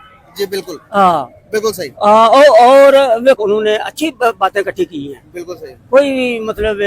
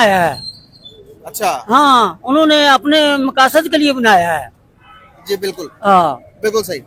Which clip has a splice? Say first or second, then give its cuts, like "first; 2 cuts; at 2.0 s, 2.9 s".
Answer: first; 1 cut; at 3.4 s